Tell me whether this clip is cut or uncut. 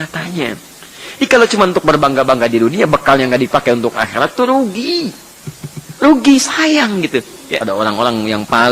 cut